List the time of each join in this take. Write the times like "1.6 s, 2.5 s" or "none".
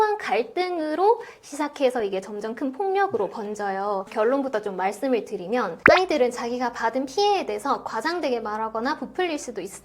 5.8 s